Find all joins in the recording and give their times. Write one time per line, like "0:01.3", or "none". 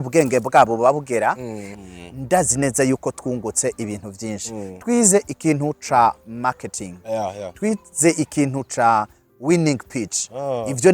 0:01.9